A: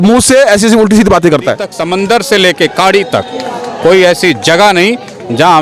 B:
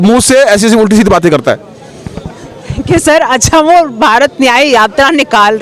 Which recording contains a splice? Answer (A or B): A